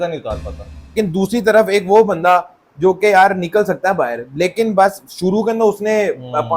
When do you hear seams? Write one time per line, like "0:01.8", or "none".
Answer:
0:00.9